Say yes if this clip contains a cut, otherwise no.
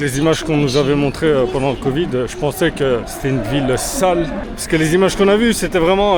no